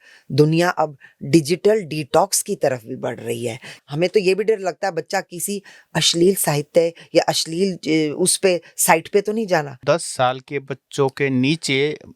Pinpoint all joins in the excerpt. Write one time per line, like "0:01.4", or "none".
0:03.7
0:09.8

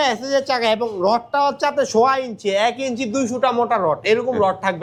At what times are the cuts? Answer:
none

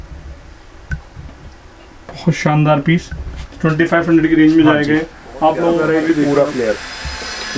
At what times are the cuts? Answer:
0:05.8

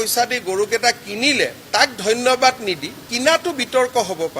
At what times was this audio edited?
0:03.1

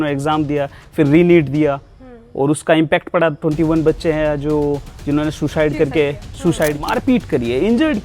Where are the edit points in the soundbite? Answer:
0:06.8

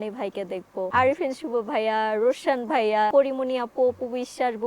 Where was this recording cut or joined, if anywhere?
0:00.9
0:03.1

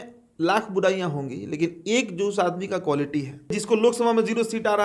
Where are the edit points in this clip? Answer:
0:03.6

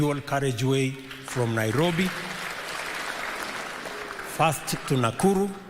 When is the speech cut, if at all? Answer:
none

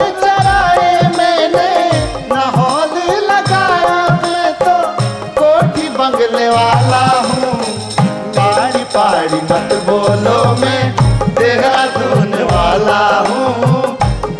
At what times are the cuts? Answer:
none

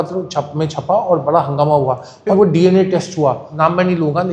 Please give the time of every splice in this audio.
0:02.3
0:03.5

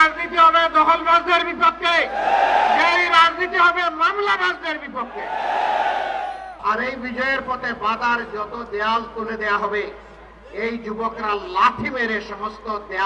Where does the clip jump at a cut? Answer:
0:06.6

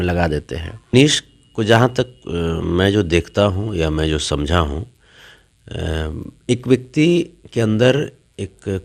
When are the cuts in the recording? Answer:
0:00.9

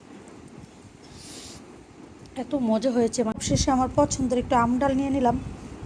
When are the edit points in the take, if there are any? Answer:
0:03.4

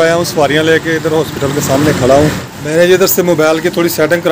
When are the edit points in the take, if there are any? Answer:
0:02.5

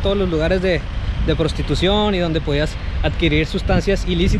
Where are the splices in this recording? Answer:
none

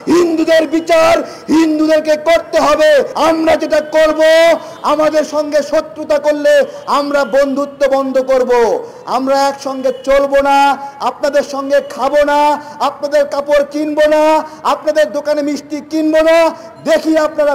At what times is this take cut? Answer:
0:03.1

